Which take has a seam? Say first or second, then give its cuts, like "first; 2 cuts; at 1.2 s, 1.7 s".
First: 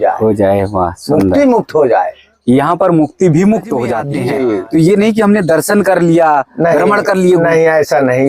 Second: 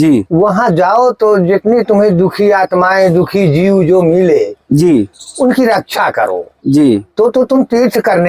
first; 1 cut; at 4.1 s